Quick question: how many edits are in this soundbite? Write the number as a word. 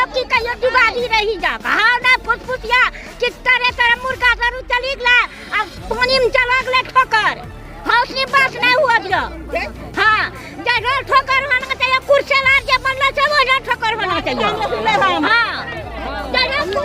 zero